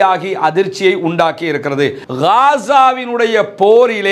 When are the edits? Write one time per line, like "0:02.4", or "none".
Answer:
0:02.0